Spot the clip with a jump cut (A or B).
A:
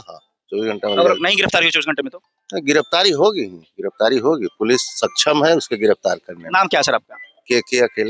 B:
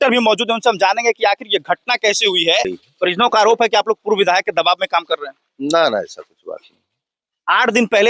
B